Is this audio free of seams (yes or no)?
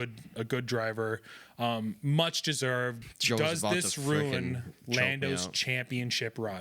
no